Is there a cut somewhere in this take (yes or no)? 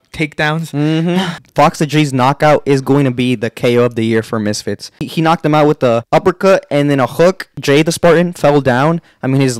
yes